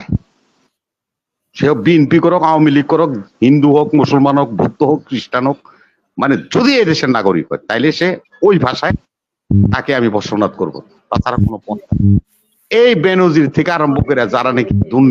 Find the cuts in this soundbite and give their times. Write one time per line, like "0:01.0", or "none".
0:12.2